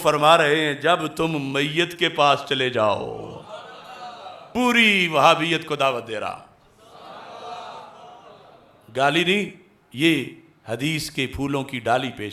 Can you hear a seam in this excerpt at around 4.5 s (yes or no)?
yes